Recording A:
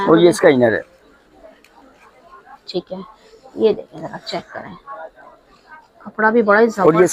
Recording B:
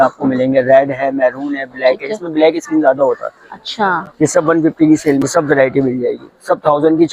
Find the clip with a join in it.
B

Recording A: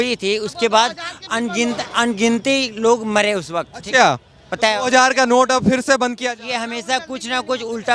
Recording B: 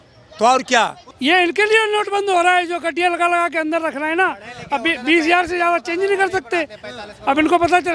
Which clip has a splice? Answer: B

